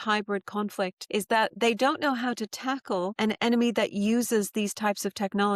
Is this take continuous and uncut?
no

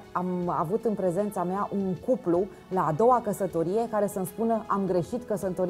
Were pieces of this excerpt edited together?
no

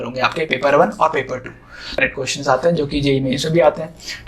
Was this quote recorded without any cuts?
no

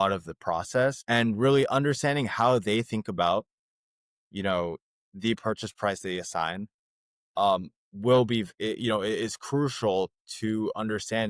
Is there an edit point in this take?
yes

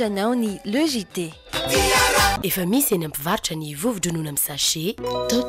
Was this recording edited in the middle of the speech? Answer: yes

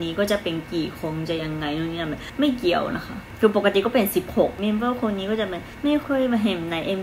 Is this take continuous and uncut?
no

